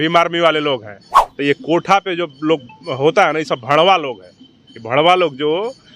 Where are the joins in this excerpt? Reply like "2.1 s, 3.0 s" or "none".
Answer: 1.2 s